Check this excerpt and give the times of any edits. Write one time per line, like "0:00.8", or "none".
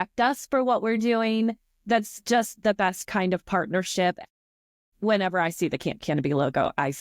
0:04.2